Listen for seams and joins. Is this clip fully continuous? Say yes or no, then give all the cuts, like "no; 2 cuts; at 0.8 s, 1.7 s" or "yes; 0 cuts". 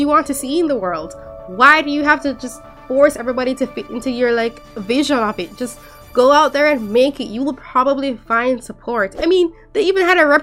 no; 1 cut; at 9.1 s